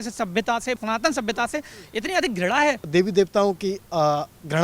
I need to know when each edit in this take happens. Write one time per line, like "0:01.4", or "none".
0:00.8
0:02.8